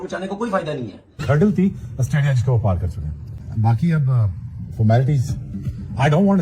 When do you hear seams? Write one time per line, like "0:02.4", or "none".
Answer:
0:01.2